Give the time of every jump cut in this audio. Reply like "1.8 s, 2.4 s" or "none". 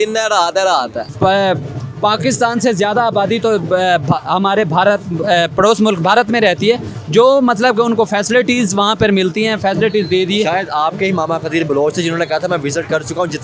1.0 s